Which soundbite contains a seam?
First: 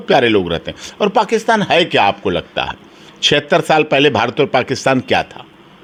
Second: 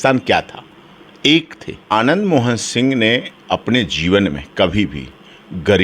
second; 1 cut; at 1.9 s

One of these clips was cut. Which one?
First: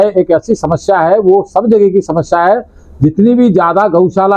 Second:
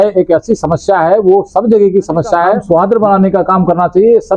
second; 1 cut; at 2.6 s

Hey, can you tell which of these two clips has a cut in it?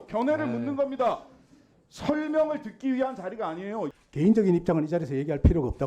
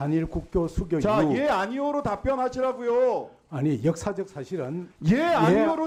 first; 1 cut; at 4.0 s

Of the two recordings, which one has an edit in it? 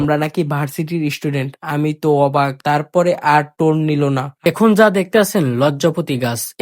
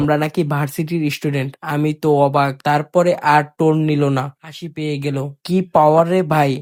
first; 1 cut; at 4.5 s

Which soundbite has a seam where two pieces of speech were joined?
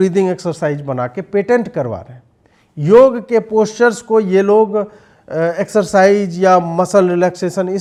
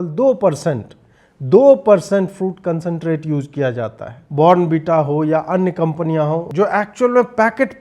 second; 2 cuts; at 4.2 s, 6.4 s

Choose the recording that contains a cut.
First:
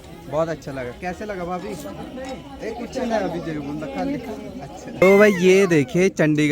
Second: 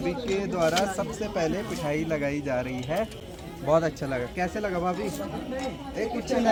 first; 1 cut; at 5.0 s

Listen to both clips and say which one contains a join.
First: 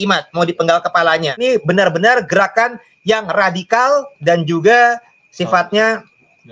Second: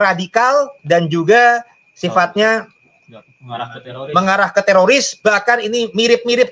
first; 1 cut; at 1.4 s

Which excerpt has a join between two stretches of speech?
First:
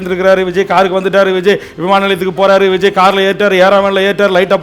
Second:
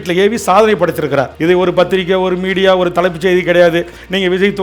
second; 1 cut; at 1.3 s

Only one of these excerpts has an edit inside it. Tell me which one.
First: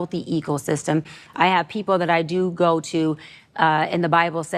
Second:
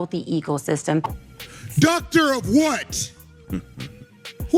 second; 1 cut; at 1.2 s

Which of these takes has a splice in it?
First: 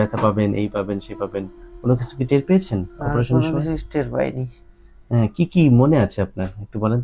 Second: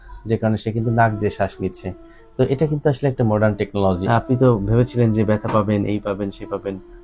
second; 1 cut; at 4.0 s

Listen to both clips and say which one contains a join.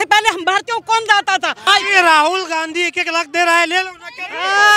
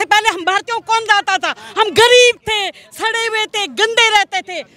first; 1 cut; at 1.6 s

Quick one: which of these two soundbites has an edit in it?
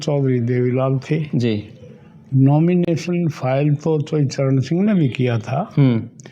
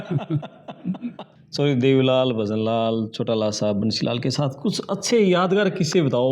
second; 1 cut; at 1.3 s

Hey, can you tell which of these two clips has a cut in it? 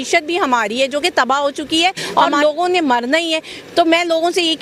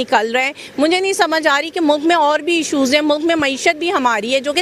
first; 1 cut; at 2.0 s

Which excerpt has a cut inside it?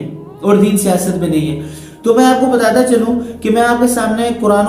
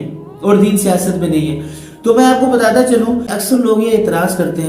second; 1 cut; at 3.3 s

